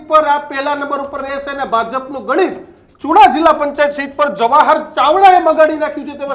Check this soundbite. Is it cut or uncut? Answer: uncut